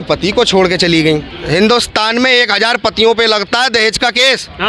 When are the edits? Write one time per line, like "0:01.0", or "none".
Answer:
0:01.3